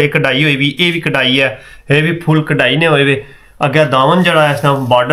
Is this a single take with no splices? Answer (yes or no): yes